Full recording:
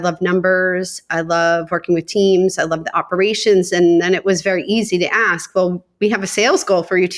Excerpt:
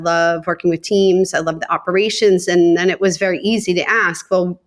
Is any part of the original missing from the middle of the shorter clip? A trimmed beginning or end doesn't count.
no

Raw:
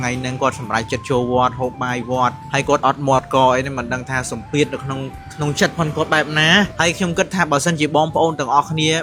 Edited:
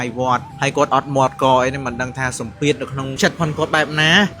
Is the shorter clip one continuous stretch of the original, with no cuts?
no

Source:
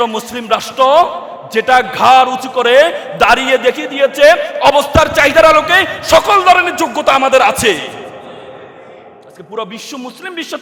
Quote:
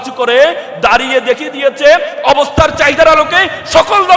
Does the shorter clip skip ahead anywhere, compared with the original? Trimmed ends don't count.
no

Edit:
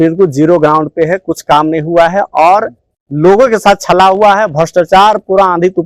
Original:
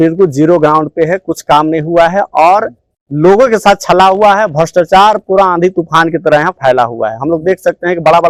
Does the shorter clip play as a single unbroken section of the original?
yes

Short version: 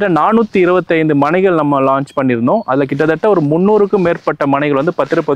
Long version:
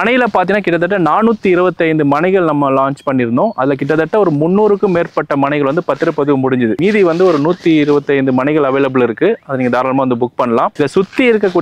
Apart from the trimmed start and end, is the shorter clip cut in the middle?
no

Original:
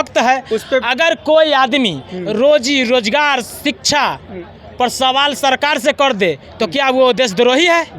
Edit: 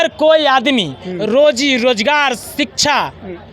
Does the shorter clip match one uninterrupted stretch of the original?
yes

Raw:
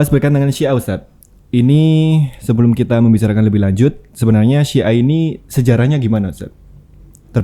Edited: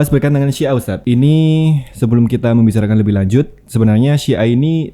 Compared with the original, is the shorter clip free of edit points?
no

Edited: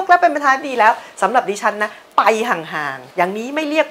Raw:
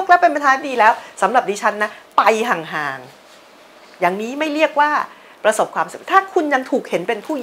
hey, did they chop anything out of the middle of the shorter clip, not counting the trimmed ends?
yes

